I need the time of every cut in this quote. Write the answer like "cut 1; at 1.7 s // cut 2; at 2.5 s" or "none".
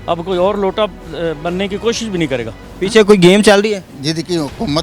cut 1; at 2.5 s // cut 2; at 3.9 s